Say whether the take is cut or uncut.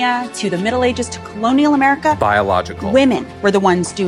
uncut